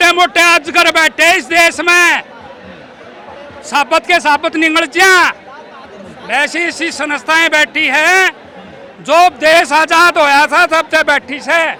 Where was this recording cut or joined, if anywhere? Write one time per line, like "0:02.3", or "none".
none